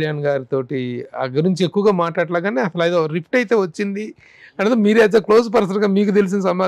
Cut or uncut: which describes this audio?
uncut